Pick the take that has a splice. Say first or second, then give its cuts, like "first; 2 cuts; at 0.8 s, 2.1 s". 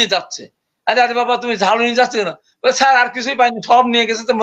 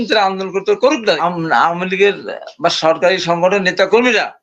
second; 1 cut; at 1.2 s